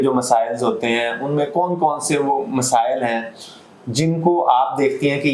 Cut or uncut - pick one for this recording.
uncut